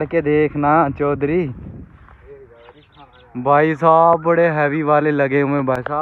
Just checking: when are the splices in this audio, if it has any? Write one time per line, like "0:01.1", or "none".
none